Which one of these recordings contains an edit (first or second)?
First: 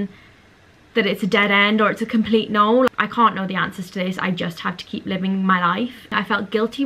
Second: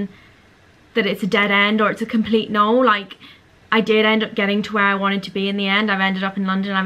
first